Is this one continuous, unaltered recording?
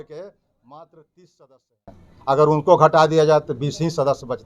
yes; 0 cuts

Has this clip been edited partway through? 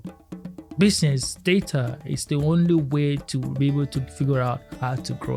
no; 0 cuts

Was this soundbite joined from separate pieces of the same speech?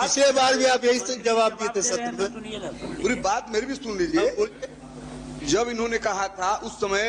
no; 0 cuts

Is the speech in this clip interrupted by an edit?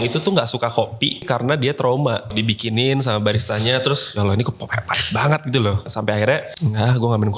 yes; 5 cuts; at 1.3 s, 2.3 s, 4.1 s, 5.8 s, 6.5 s

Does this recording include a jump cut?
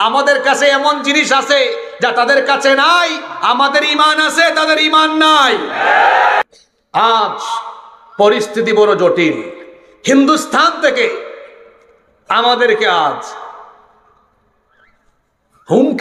yes; 1 cut; at 6.6 s

